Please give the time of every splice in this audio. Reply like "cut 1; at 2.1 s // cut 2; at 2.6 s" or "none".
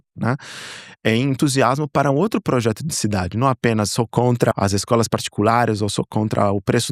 cut 1; at 4.1 s